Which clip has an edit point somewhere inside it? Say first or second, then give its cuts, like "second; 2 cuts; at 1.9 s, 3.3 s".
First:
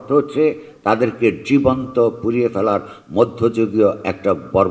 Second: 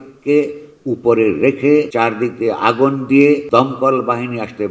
second; 2 cuts; at 1.9 s, 3.4 s